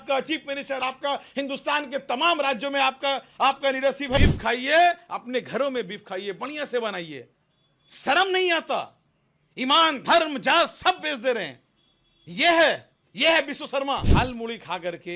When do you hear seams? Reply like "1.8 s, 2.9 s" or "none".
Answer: 4.2 s, 14.1 s